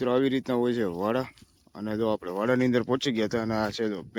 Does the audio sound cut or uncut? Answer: uncut